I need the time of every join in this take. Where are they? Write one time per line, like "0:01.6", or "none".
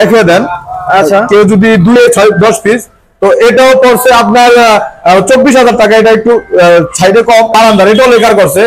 0:02.0
0:07.5